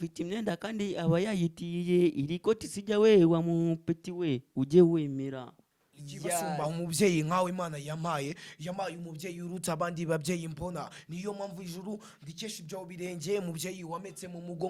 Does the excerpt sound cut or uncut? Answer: cut